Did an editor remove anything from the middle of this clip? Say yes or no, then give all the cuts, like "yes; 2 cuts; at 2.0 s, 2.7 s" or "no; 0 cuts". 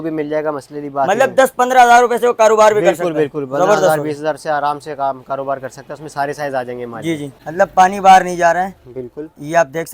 yes; 1 cut; at 7.4 s